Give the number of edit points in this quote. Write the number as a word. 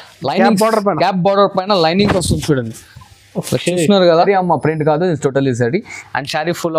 one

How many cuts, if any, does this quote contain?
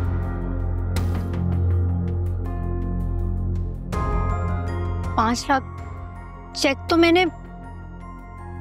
zero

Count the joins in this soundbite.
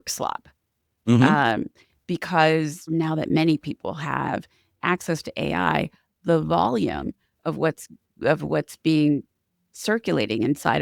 one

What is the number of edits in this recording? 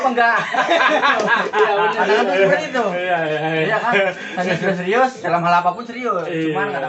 zero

